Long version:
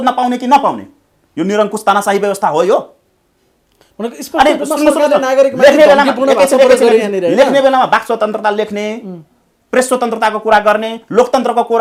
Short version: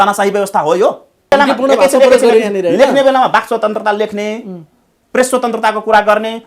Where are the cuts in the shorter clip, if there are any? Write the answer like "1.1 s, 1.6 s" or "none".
1.3 s